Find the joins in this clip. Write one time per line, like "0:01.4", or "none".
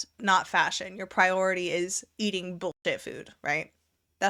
none